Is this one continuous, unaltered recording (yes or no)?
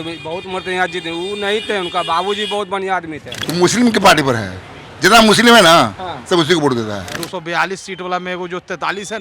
no